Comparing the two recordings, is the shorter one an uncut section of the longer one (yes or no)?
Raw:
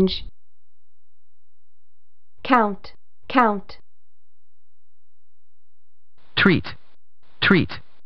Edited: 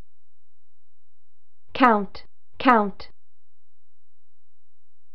yes